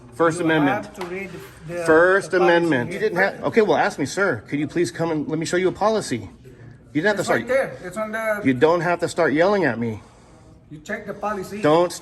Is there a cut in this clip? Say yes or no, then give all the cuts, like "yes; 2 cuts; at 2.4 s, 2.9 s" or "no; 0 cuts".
yes; 1 cut; at 3.0 s